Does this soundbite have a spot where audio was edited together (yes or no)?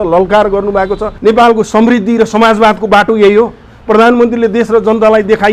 yes